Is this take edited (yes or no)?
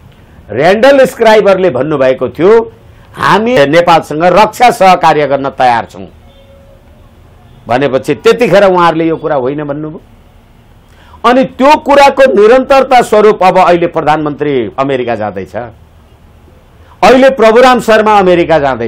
yes